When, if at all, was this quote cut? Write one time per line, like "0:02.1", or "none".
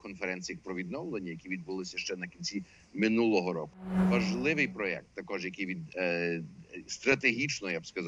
0:03.9

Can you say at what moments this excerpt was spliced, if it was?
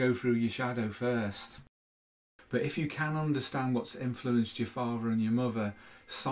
0:01.8

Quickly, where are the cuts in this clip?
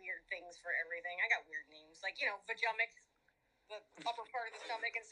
none

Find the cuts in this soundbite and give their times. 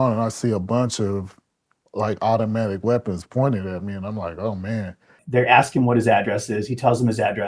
0:05.2

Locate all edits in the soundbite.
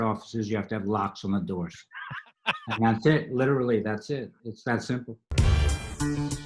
0:05.2

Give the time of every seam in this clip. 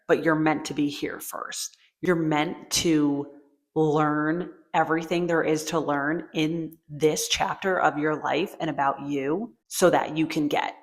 none

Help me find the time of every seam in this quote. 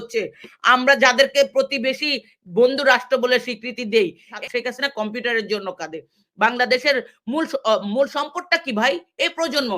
0:04.3

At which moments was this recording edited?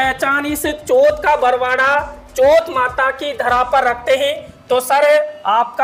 none

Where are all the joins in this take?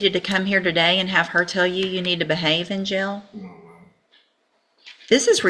none

